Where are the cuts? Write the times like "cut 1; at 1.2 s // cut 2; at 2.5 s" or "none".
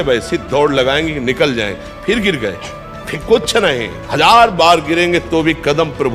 cut 1; at 4.0 s